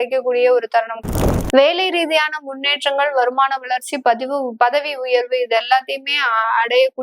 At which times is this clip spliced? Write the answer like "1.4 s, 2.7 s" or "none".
1.0 s